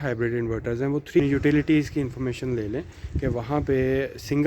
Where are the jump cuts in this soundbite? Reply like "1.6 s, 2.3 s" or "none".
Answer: 1.2 s